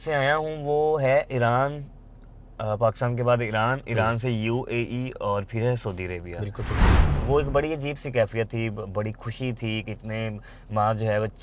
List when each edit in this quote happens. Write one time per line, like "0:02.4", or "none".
0:07.0